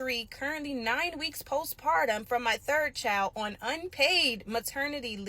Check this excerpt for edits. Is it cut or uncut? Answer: cut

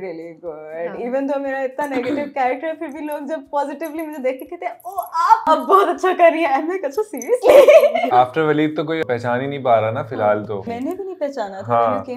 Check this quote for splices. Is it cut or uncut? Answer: cut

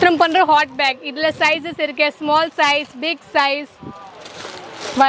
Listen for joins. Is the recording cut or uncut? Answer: uncut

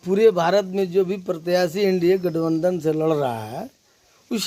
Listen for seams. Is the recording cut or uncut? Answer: uncut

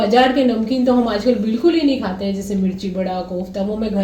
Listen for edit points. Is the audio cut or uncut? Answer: uncut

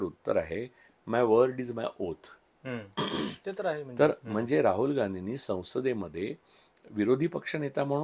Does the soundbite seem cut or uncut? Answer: uncut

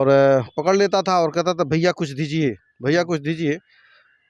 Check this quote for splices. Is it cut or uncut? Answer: uncut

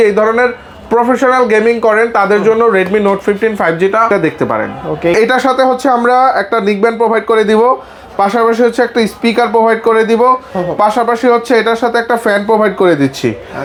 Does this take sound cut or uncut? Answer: uncut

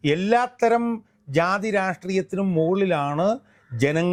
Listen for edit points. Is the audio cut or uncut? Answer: uncut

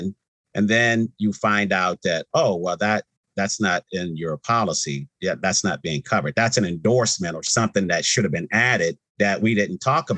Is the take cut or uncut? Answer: cut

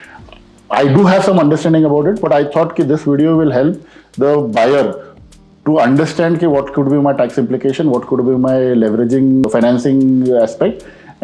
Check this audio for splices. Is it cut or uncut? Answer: uncut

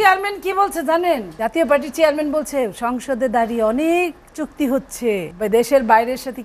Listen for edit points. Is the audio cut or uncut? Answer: cut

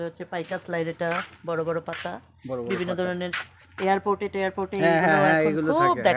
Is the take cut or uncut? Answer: uncut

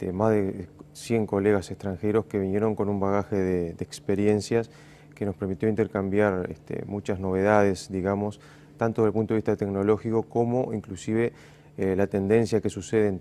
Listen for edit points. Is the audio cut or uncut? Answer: cut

